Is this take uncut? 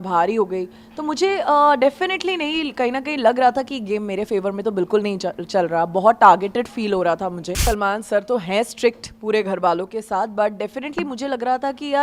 no; 1 cut; at 7.6 s

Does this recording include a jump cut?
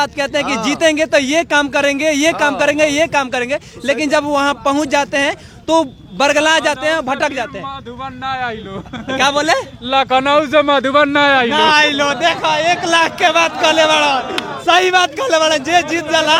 no; 0 cuts

